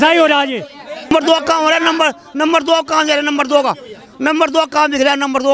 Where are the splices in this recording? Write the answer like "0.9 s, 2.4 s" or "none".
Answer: 1.1 s